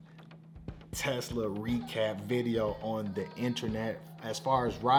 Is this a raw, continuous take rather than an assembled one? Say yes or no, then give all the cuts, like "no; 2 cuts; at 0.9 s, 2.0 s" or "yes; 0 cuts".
yes; 0 cuts